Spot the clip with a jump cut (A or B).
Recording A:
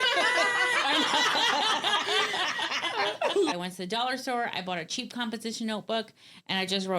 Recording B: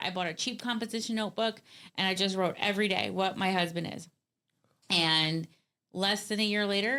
A